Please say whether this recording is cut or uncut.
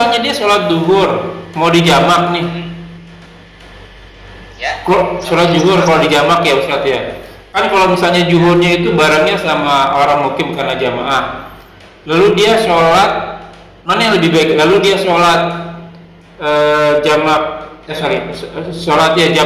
uncut